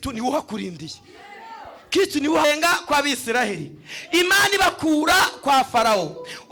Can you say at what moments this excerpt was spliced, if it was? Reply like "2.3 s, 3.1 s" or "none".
2.4 s